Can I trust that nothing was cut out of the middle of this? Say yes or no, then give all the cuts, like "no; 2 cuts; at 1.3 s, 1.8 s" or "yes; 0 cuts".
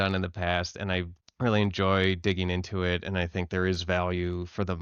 no; 1 cut; at 1.2 s